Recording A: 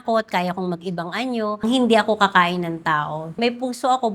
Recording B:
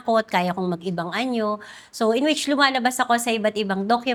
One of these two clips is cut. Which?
A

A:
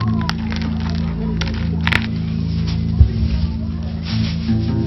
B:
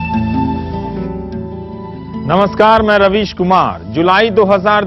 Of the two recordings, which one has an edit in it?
B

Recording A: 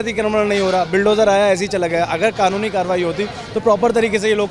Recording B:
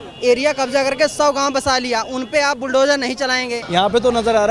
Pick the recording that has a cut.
B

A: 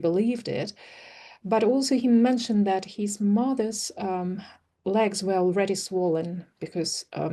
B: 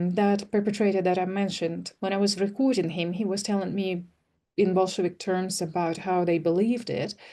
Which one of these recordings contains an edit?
B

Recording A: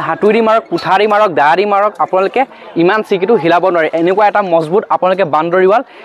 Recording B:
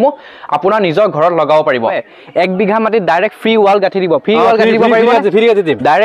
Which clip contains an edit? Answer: B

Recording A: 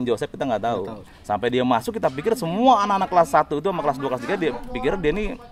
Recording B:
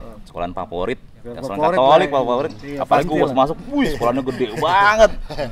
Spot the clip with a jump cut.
A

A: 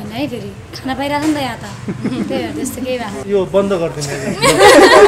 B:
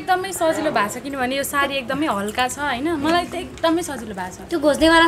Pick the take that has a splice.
A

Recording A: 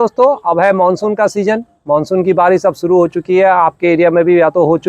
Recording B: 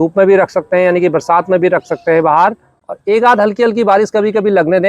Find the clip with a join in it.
B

